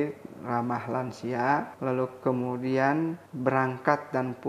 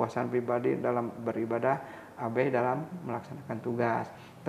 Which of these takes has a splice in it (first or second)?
first